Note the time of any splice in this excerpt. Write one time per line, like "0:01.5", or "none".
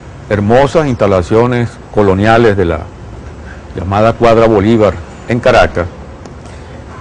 0:01.0